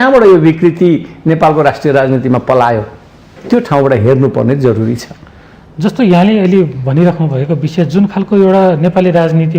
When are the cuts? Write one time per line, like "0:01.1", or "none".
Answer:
none